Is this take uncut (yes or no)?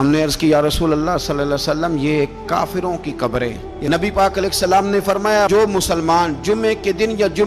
no